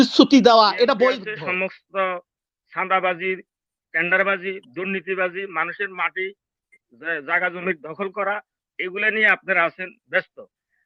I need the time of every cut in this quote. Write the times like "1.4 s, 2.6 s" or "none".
1.3 s